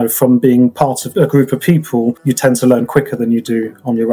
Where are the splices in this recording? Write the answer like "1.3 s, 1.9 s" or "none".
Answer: 1.1 s, 2.2 s